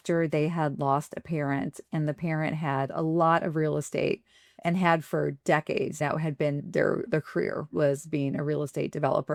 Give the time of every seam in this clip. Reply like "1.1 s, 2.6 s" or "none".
none